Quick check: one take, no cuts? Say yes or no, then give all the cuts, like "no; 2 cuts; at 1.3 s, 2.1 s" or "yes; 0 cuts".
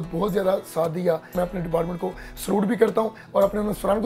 no; 1 cut; at 1.3 s